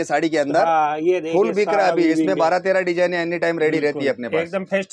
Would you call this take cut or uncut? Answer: uncut